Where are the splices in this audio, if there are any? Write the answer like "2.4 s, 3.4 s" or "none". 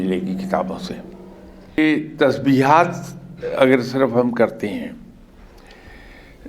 1.8 s